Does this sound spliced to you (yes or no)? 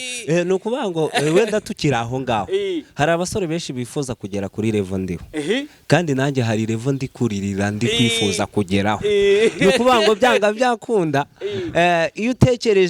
no